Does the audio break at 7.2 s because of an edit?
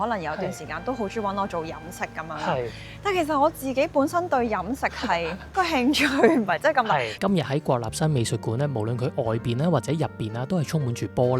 yes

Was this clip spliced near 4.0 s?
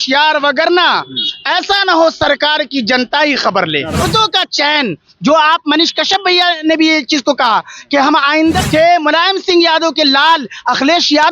yes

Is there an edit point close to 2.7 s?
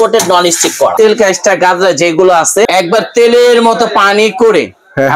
yes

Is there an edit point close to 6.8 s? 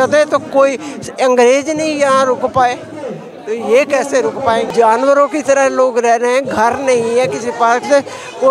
no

